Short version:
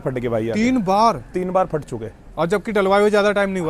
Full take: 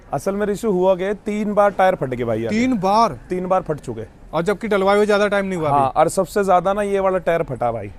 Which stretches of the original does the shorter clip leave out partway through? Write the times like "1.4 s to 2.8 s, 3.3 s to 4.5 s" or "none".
none